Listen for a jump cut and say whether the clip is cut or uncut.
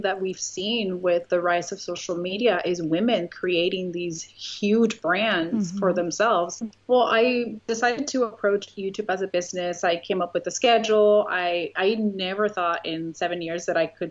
cut